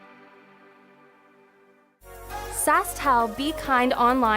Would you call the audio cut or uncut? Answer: cut